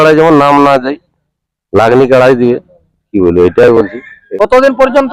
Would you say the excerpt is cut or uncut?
uncut